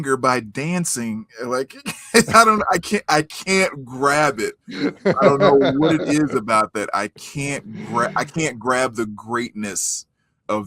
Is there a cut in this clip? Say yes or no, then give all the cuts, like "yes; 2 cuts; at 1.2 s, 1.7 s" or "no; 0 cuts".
no; 0 cuts